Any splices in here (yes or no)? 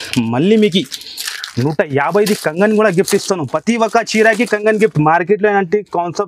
no